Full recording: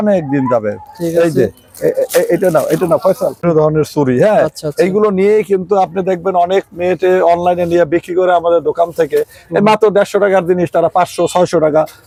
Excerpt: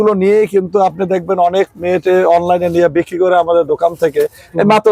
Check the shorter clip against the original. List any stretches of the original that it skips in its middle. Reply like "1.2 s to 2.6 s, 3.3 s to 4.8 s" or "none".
none